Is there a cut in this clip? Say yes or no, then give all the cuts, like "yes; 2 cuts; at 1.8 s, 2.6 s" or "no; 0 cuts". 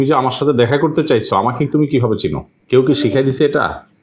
no; 0 cuts